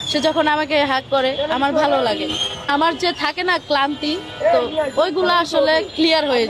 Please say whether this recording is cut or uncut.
cut